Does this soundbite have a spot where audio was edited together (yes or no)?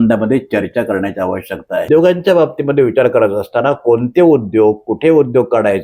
yes